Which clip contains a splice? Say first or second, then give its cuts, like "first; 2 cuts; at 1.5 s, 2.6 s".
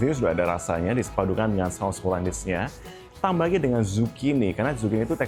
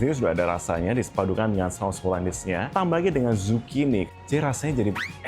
second; 2 cuts; at 2.7 s, 4.1 s